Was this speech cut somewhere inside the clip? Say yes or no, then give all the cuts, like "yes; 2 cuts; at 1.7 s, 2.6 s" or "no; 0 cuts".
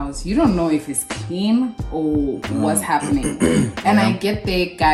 no; 0 cuts